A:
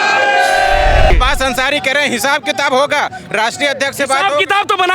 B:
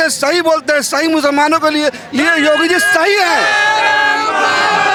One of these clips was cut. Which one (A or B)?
A